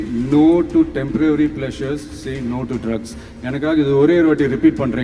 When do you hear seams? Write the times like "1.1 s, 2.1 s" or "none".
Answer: none